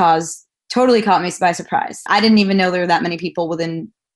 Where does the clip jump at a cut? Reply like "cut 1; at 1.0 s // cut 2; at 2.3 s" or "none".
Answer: cut 1; at 2.0 s

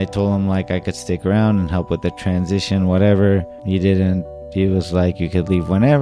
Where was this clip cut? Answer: none

